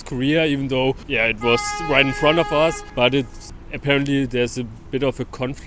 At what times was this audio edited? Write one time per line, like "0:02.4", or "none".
none